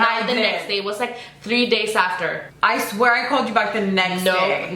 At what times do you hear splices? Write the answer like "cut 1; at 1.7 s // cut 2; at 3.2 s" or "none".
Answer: cut 1; at 2.5 s